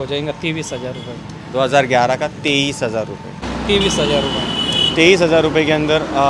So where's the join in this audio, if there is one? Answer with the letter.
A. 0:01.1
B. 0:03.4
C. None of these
B